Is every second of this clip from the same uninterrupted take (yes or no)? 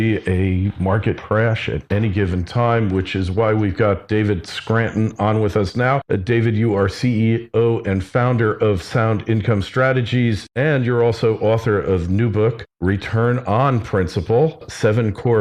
no